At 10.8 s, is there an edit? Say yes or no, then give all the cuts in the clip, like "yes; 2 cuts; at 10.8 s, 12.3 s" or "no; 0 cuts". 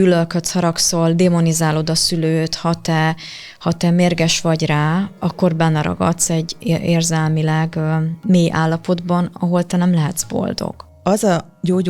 yes; 1 cut; at 10.8 s